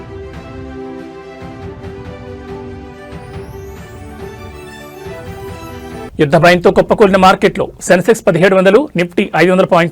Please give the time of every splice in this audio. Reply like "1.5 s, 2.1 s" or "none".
4.6 s, 6.1 s